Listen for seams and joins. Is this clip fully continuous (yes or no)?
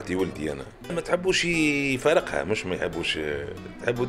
no